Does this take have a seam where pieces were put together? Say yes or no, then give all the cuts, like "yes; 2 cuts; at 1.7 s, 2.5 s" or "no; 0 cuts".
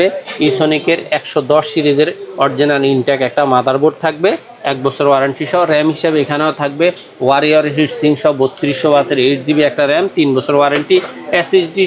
no; 0 cuts